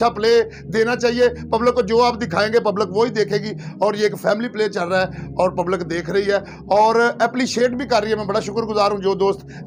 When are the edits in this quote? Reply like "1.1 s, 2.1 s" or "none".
none